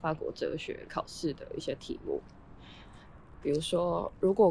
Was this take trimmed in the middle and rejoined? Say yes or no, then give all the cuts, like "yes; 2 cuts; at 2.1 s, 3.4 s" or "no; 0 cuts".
no; 0 cuts